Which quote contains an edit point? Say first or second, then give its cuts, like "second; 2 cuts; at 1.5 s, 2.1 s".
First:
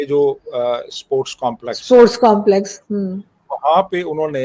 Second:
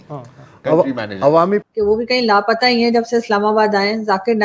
second; 1 cut; at 1.6 s